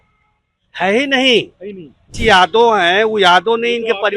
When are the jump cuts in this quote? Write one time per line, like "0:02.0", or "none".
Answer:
0:02.2